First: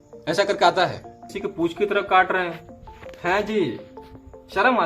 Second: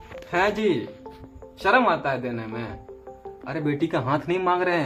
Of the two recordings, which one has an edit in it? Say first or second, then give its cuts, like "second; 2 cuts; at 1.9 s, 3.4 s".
first; 1 cut; at 1.3 s